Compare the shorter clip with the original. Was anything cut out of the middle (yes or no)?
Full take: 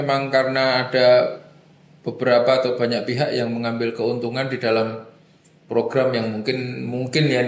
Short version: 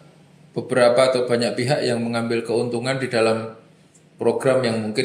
no